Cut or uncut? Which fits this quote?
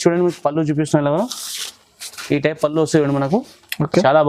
uncut